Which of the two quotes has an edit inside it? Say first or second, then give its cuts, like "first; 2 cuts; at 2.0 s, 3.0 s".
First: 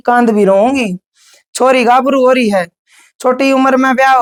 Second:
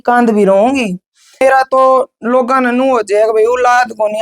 second; 1 cut; at 1.4 s